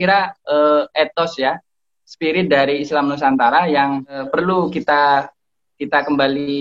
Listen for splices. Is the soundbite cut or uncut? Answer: cut